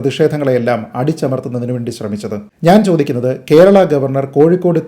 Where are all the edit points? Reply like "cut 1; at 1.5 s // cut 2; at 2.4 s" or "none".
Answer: cut 1; at 2.5 s